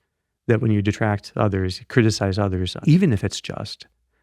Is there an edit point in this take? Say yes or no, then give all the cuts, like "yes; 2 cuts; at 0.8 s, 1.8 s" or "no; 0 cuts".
yes; 1 cut; at 2.7 s